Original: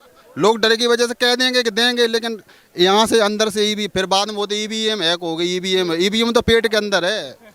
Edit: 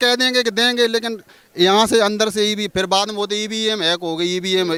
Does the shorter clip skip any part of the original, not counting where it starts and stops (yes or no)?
no